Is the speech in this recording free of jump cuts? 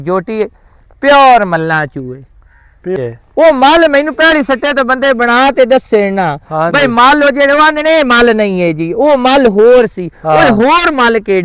no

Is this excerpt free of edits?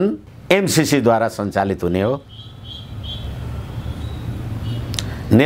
yes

